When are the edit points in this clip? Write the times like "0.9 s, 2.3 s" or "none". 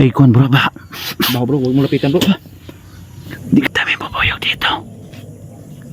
3.7 s

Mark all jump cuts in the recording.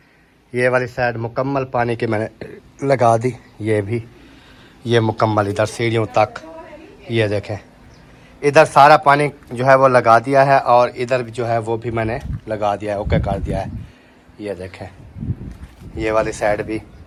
none

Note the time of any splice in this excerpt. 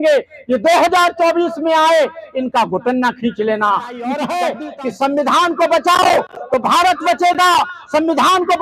4.2 s

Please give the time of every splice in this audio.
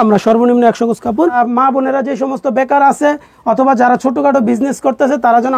1.3 s

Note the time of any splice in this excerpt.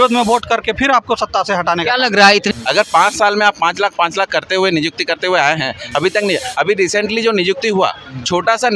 2.5 s

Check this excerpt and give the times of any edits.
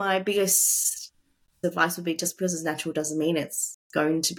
none

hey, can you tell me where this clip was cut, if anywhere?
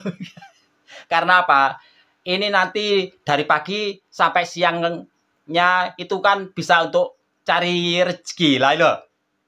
none

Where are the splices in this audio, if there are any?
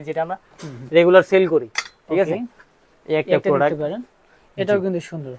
none

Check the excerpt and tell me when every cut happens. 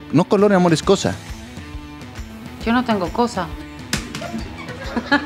none

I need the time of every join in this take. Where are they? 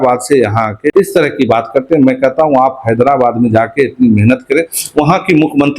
0.9 s

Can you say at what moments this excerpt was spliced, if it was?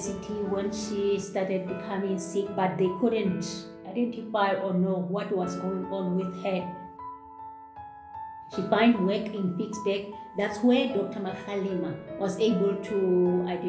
none

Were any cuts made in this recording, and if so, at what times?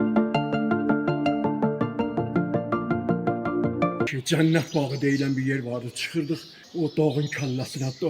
4.1 s, 6.6 s

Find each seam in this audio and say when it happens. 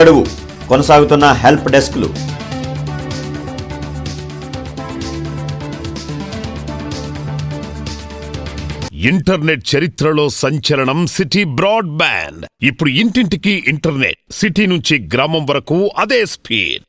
8.8 s

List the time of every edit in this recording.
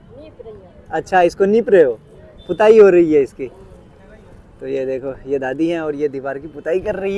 none

